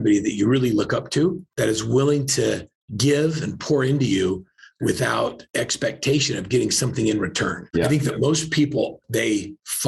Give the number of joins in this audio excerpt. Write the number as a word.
four